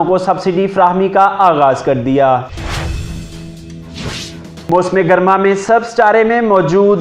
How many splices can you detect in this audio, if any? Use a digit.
2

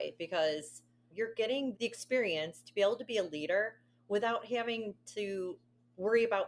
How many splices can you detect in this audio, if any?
2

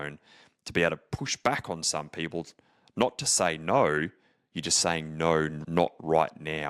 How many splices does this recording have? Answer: 1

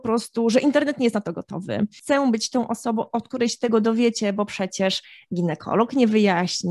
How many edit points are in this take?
1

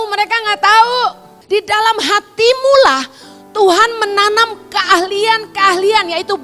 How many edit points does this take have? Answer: 1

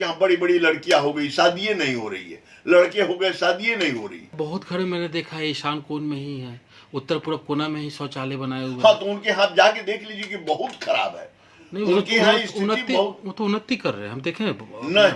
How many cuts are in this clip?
1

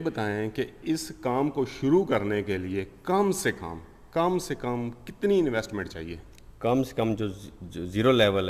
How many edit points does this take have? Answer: 0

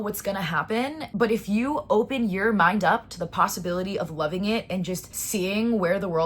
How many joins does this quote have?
2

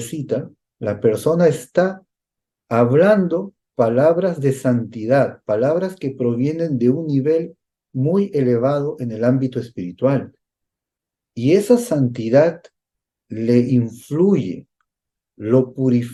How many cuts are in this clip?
0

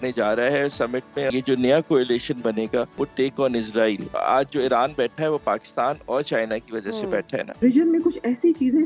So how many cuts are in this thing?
4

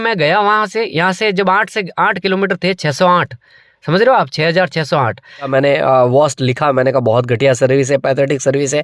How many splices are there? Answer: 1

